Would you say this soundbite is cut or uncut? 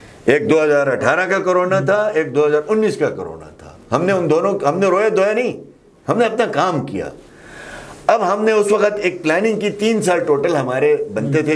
uncut